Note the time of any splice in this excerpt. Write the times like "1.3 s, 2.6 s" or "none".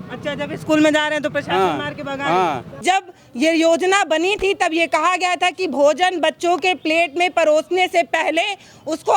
2.8 s

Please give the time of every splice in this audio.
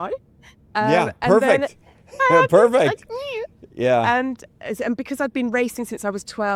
none

